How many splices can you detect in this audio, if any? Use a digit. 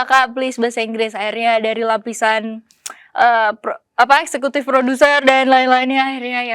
0